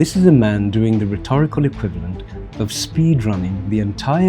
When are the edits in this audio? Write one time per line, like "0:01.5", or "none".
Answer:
none